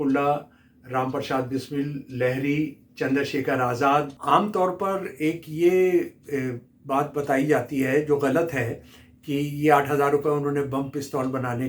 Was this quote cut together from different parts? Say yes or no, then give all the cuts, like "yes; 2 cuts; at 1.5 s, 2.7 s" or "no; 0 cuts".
yes; 1 cut; at 4.1 s